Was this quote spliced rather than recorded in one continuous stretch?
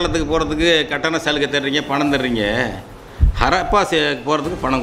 no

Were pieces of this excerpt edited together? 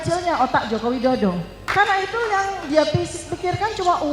yes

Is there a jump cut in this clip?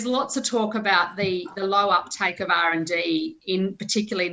no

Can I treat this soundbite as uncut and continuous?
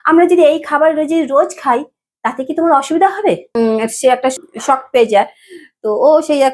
no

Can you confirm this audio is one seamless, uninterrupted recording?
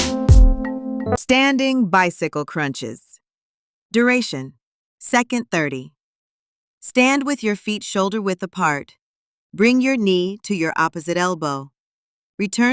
no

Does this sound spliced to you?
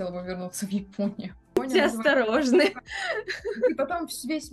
yes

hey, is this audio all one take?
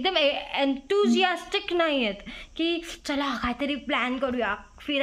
yes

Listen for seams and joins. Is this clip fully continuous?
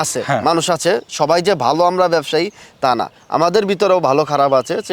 yes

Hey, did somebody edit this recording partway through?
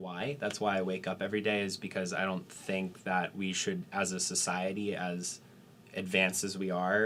no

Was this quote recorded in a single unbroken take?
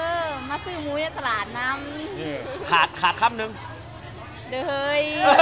yes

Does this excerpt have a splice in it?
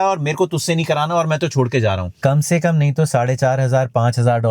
yes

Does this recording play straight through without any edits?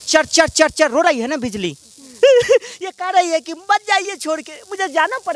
yes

